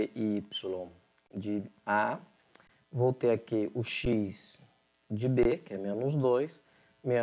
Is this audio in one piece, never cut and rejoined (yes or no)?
yes